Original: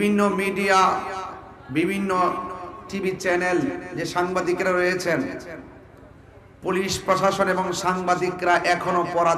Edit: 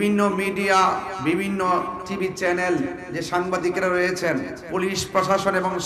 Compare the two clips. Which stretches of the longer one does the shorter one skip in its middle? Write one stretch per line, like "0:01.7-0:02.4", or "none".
0:01.1-0:01.6
0:02.5-0:02.8
0:05.4-0:06.5